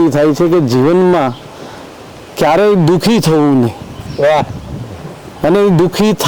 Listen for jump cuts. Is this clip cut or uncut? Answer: uncut